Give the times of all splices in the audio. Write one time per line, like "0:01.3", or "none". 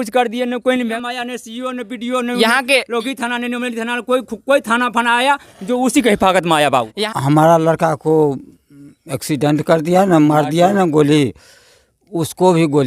0:00.9
0:07.1